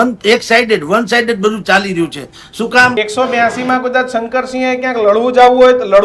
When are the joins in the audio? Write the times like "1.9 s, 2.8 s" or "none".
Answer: 2.9 s